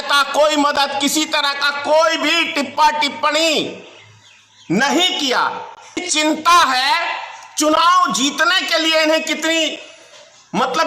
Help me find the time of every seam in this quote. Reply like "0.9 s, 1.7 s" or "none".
6.0 s

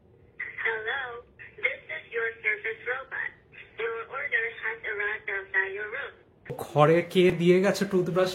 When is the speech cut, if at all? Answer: 6.6 s

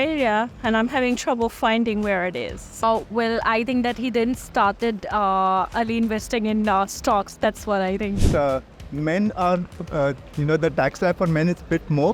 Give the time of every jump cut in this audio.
2.8 s, 8.2 s

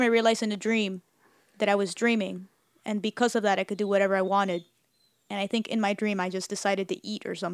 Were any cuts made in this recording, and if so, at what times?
none

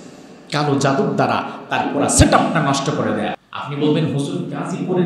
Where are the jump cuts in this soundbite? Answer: 3.4 s

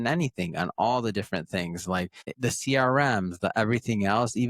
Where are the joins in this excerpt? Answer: 2.2 s

